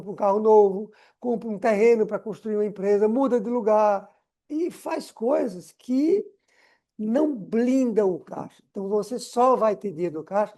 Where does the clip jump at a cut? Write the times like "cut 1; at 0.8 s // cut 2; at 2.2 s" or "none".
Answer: none

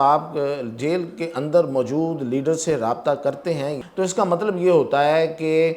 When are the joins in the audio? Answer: cut 1; at 3.8 s

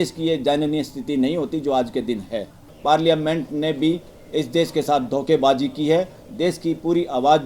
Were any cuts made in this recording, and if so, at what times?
cut 1; at 2.7 s

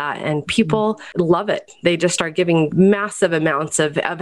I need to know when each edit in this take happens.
cut 1; at 1.0 s // cut 2; at 2.7 s

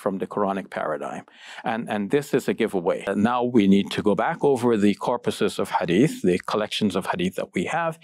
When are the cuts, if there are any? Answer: cut 1; at 3.1 s

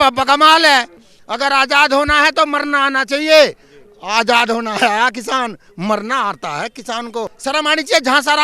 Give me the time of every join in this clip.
cut 1; at 1.0 s // cut 2; at 7.3 s

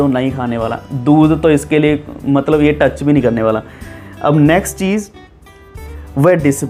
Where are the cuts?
none

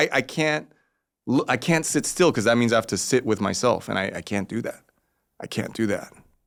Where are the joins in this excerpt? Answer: none

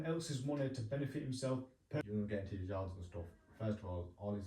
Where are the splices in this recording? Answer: cut 1; at 2.0 s

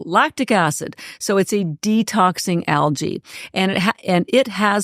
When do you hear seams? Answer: none

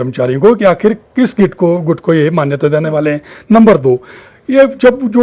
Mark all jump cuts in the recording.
none

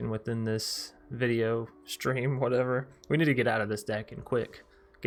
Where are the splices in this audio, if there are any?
none

